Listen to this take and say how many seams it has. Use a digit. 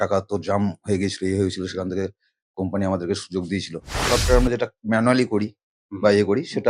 1